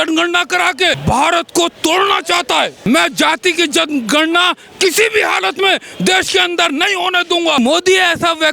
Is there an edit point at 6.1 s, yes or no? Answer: no